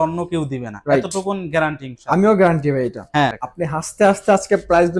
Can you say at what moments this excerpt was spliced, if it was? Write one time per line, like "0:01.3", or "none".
0:03.4